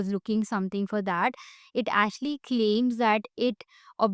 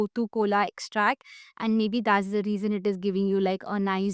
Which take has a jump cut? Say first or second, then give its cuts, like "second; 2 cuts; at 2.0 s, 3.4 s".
first; 1 cut; at 1.6 s